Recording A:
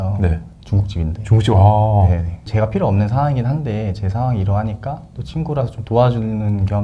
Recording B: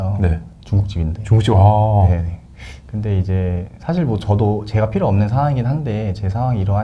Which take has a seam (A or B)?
A